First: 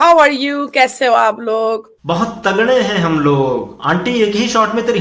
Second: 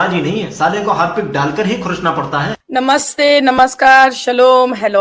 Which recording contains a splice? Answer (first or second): second